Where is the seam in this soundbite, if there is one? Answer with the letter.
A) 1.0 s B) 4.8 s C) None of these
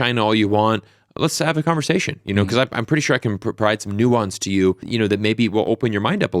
B